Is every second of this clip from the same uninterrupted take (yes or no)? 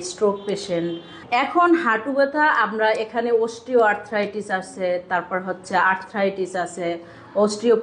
no